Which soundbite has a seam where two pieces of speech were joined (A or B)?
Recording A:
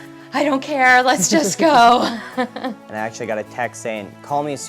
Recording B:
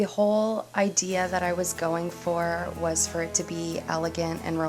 A